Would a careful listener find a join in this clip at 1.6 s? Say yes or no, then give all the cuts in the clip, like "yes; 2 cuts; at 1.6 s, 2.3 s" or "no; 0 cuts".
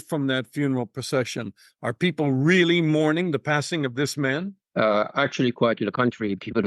no; 1 cut; at 4.6 s